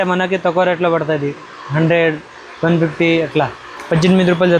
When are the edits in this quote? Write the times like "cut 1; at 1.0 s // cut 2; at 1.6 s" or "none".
cut 1; at 3.7 s